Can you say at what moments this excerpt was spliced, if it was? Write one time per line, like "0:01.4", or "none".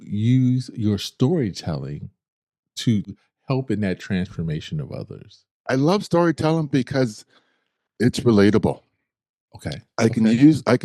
0:05.5